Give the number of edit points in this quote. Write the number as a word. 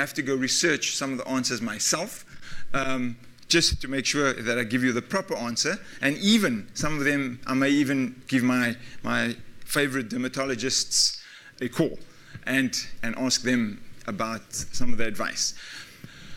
one